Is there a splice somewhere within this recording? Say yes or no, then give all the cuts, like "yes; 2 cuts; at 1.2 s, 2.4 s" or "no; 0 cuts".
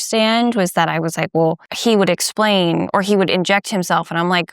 yes; 1 cut; at 1.7 s